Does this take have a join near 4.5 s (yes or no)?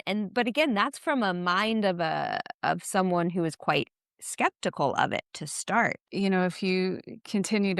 no